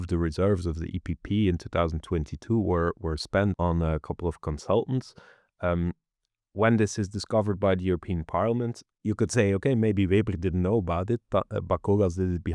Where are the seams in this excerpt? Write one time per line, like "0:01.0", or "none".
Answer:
0:03.6
0:08.9